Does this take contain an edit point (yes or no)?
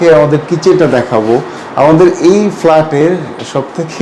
no